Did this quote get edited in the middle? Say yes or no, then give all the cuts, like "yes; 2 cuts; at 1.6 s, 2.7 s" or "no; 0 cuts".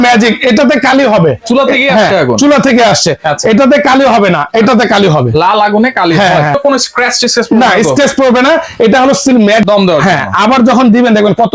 yes; 2 cuts; at 6.6 s, 9.6 s